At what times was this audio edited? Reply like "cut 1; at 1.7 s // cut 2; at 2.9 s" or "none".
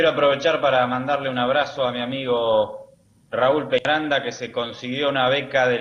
none